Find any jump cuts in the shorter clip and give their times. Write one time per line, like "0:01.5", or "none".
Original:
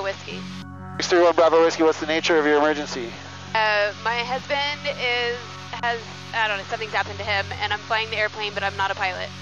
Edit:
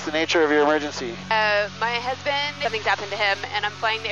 0:01.1
0:02.6